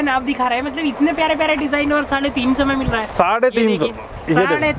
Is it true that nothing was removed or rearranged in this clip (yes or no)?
yes